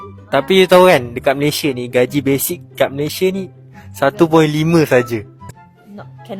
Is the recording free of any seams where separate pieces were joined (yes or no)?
no